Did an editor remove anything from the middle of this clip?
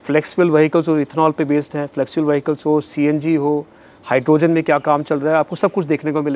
no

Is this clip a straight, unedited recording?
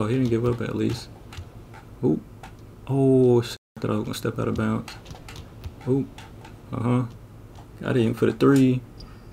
yes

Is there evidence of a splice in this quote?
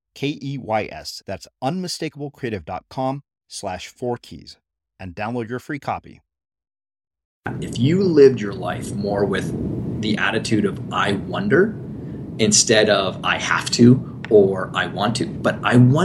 yes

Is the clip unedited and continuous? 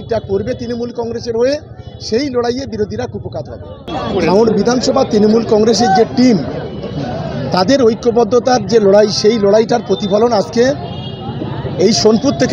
no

